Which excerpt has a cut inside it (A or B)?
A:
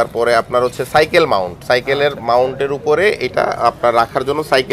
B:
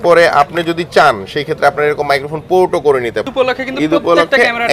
B